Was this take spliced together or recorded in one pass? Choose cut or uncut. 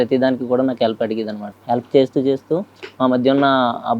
cut